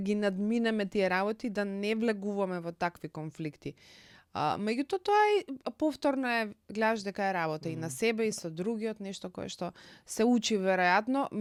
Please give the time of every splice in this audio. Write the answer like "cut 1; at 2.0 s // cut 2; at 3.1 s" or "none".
none